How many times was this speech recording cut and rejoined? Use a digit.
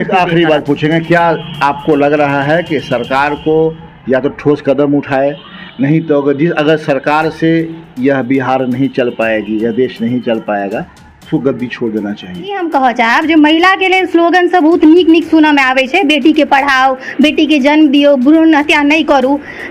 1